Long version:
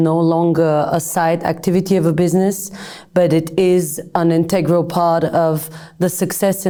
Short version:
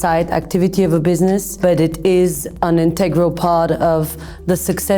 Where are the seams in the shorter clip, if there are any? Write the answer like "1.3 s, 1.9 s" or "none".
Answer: 1.5 s